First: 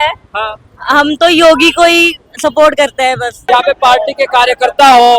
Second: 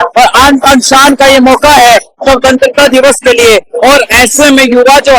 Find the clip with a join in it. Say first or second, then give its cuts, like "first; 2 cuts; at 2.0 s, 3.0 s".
first; 1 cut; at 3.3 s